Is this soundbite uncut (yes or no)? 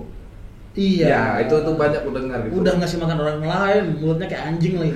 yes